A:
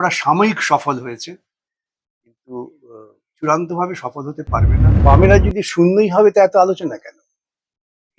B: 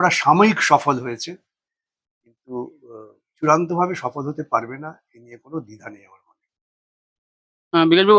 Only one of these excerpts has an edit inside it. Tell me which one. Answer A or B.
A